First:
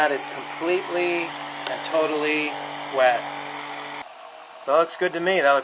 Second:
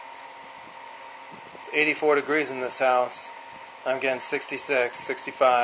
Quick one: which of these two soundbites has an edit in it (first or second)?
first